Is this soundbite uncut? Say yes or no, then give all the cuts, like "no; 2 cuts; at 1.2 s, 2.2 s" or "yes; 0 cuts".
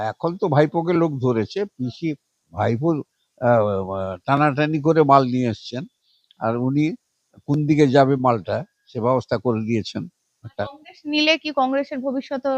no; 1 cut; at 10.7 s